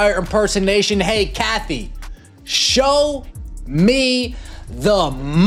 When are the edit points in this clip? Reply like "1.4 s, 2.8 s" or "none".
none